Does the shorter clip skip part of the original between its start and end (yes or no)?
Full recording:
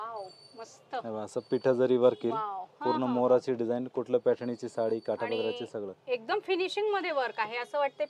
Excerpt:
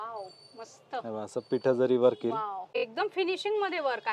yes